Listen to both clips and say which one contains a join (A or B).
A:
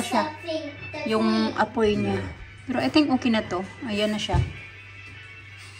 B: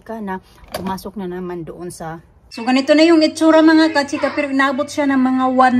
B